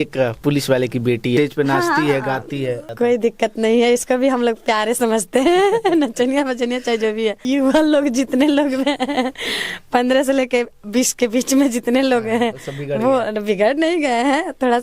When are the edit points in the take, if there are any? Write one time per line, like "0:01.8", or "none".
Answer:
0:01.4
0:02.9
0:07.5